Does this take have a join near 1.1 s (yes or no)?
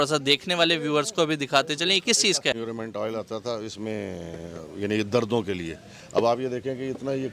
no